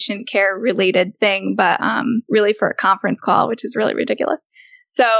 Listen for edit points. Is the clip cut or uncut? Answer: cut